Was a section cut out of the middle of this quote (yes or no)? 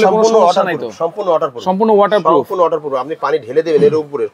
no